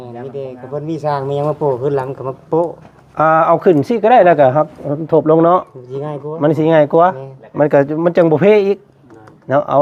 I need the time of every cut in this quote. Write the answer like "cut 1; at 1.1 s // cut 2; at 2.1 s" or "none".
none